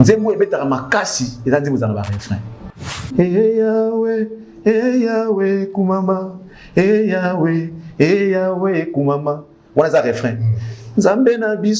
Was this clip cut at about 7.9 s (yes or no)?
no